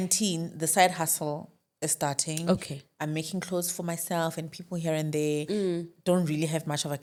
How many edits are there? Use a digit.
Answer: 0